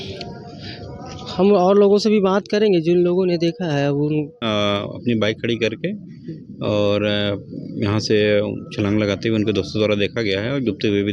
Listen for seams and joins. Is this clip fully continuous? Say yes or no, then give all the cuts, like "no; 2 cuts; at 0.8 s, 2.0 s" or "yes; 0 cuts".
no; 1 cut; at 4.4 s